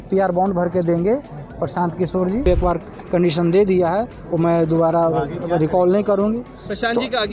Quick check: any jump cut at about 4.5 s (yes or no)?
no